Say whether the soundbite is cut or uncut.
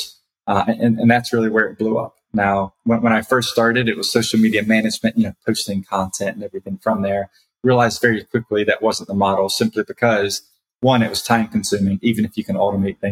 uncut